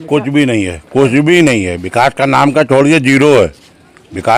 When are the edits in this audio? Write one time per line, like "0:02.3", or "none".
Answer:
none